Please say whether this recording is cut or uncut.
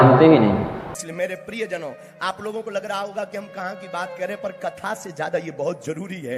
uncut